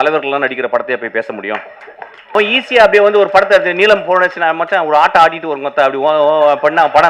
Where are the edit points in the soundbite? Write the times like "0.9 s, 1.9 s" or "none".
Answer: 2.3 s